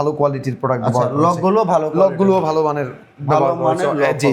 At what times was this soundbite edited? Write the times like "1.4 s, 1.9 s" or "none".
none